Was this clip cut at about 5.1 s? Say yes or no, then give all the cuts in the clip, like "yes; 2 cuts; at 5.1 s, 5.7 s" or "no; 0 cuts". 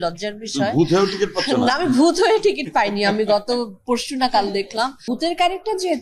yes; 1 cut; at 5.1 s